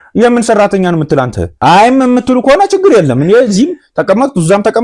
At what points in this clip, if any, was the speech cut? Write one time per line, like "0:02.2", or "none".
0:01.4